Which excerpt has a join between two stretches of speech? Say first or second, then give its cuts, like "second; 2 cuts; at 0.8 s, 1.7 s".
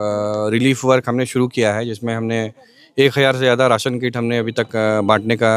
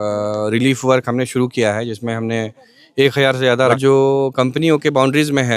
second; 1 cut; at 3.8 s